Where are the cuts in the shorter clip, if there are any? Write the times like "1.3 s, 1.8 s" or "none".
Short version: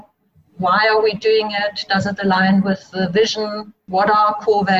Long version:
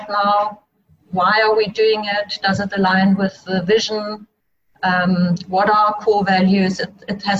3.8 s